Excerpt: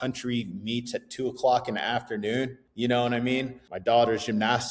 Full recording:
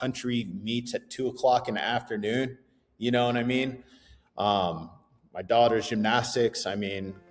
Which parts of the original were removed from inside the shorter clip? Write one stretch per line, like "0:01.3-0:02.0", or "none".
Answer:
0:02.6-0:02.9
0:03.9-0:05.3